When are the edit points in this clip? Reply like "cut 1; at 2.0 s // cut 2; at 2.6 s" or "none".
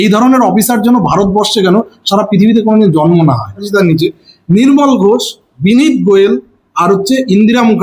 cut 1; at 4.1 s